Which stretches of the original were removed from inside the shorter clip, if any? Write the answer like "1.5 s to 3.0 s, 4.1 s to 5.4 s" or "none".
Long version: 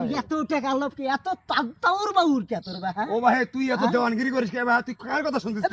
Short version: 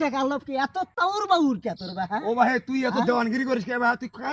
1.4 s to 1.8 s